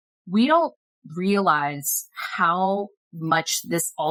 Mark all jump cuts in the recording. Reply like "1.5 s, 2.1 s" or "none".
none